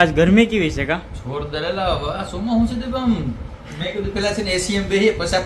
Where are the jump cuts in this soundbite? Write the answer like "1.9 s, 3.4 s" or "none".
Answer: none